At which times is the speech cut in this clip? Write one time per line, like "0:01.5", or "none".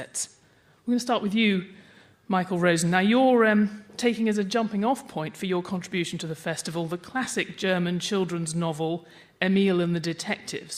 0:06.1